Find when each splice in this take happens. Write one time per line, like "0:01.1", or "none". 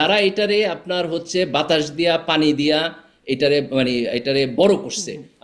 none

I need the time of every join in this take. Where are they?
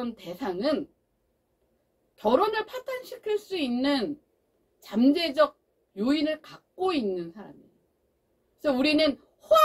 none

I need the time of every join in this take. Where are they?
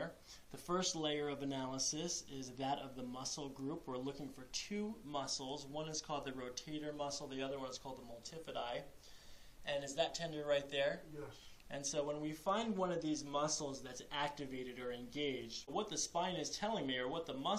0:11.7

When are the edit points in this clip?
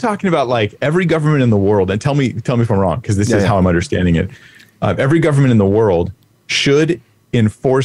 none

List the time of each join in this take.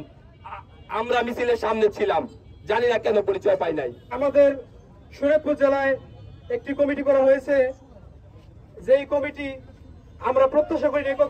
none

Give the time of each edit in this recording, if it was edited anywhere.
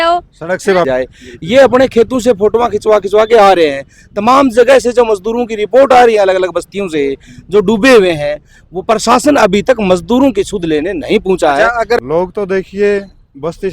0:00.9
0:12.0

